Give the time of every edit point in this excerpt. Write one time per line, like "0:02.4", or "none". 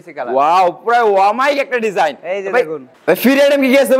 0:02.9